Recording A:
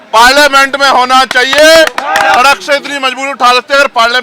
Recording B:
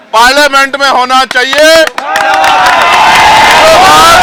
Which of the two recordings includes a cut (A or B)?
A